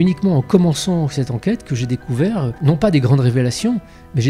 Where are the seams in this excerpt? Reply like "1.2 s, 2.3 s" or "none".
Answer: 2.5 s